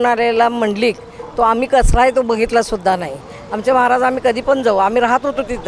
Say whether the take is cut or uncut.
uncut